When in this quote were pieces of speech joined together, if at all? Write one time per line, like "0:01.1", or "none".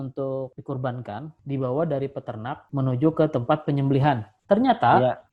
0:01.4
0:02.7